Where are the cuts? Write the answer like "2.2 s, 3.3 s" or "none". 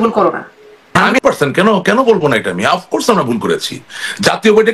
1.1 s